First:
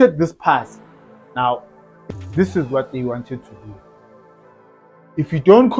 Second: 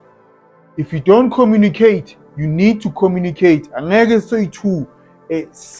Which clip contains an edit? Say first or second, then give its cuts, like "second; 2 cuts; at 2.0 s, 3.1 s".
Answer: first; 1 cut; at 2.0 s